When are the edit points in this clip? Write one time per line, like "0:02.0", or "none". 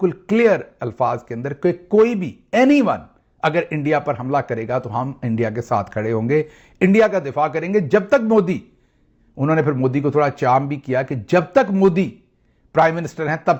none